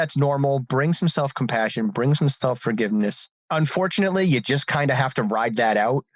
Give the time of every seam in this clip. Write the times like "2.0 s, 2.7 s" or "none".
3.3 s